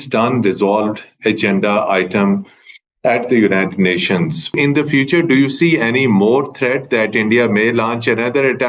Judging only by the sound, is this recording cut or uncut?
cut